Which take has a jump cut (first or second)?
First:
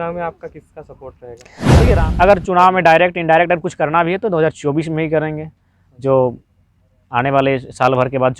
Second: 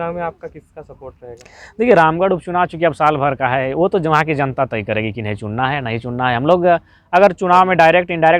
first